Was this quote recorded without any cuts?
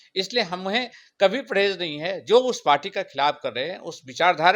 yes; 0 cuts

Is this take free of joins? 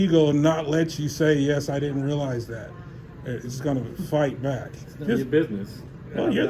yes; 0 cuts

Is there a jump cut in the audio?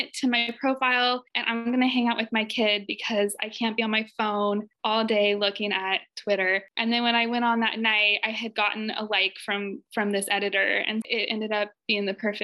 yes; 1 cut; at 11.1 s

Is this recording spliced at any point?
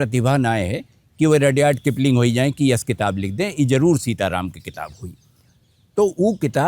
no; 0 cuts

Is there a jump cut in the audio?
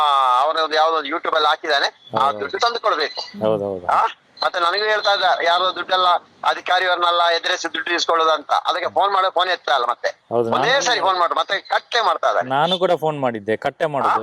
no; 0 cuts

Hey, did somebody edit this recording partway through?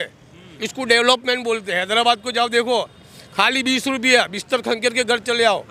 no; 0 cuts

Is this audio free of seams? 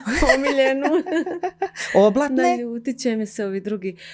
yes; 0 cuts

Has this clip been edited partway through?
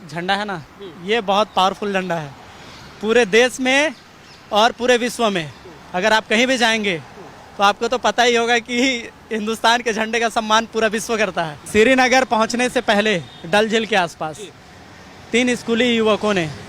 yes; 1 cut; at 11.5 s

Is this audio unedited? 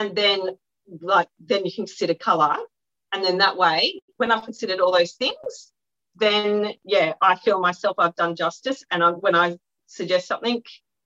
yes; 0 cuts

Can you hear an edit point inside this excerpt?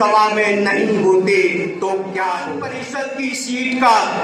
yes; 1 cut; at 2.8 s

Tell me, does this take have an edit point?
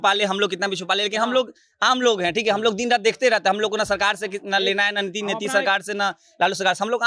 no; 0 cuts

